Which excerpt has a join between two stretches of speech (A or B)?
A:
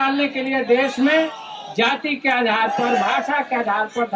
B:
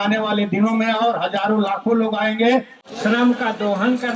B